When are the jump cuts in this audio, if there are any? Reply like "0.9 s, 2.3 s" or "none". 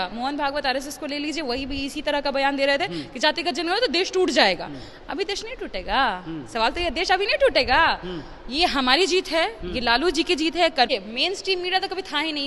10.9 s